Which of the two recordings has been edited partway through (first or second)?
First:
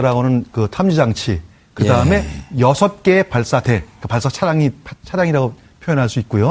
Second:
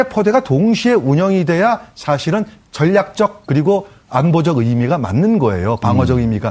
second